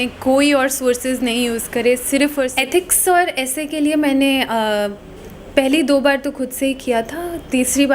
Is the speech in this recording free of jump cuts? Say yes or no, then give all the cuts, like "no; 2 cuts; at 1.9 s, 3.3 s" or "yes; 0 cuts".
no; 1 cut; at 2.5 s